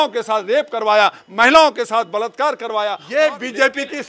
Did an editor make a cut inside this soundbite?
yes; 1 cut; at 3.0 s

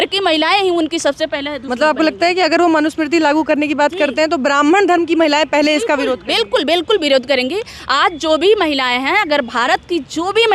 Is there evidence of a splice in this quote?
no; 0 cuts

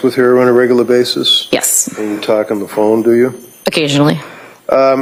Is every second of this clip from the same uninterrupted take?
yes; 0 cuts

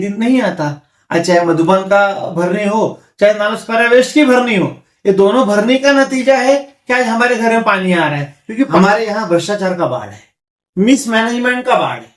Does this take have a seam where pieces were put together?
yes; 1 cut; at 8.7 s

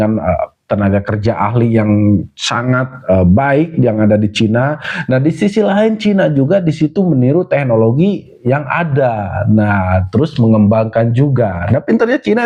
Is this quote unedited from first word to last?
yes; 0 cuts

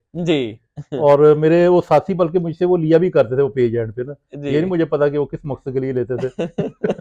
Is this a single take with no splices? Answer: yes; 0 cuts

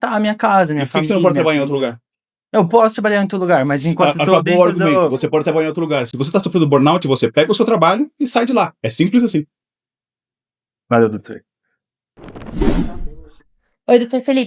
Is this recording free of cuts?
yes; 0 cuts

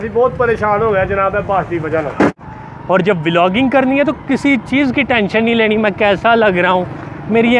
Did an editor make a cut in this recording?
yes; 1 cut; at 2.4 s

